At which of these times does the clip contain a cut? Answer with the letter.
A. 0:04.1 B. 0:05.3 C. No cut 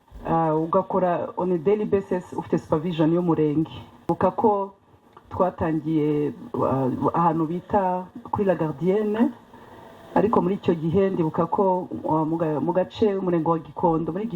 A